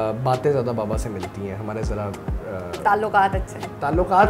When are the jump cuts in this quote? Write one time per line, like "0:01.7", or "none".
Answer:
none